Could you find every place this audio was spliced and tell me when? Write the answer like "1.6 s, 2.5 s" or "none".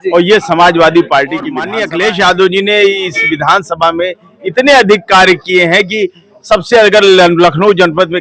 1.7 s